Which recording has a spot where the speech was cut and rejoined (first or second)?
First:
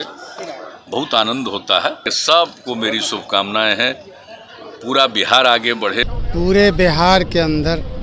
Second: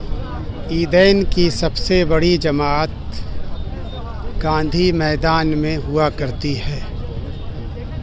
first